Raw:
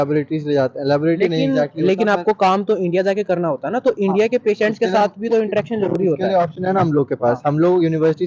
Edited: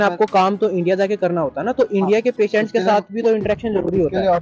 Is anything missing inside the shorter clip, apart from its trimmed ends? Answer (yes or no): no